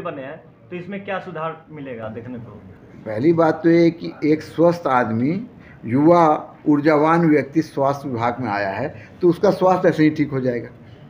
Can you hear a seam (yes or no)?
no